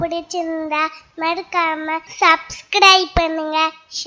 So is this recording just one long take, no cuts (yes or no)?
no